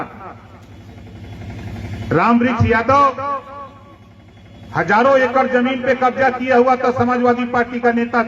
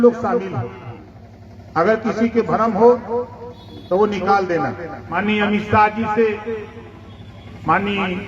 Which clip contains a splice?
second; 1 cut; at 5.2 s

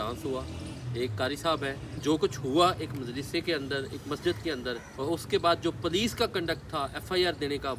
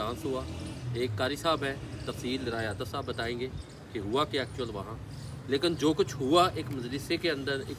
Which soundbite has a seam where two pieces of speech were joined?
first; 2 cuts; at 2.0 s, 4.9 s

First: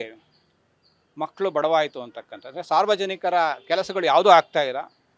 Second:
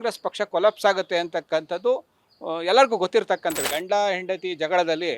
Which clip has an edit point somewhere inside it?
second; 1 cut; at 3.6 s

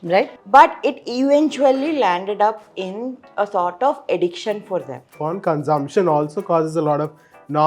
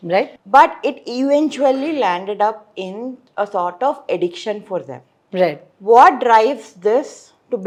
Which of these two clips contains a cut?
first; 1 cut; at 5.2 s

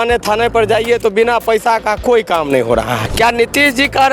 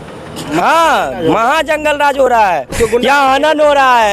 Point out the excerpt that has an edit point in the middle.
first; 1 cut; at 3.0 s

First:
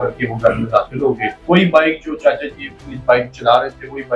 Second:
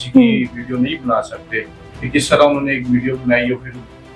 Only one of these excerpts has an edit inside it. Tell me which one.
first; 1 cut; at 1.3 s

